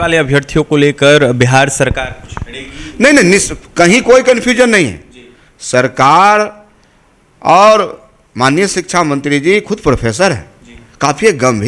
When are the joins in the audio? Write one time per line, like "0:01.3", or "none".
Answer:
none